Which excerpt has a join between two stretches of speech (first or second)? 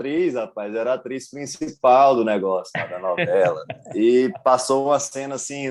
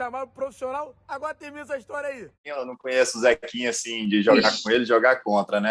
second